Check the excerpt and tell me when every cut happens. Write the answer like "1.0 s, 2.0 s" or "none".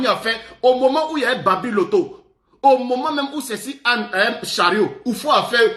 none